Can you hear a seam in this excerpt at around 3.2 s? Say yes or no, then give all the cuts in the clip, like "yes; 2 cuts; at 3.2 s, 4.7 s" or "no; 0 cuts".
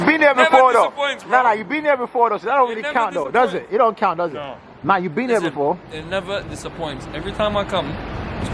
no; 0 cuts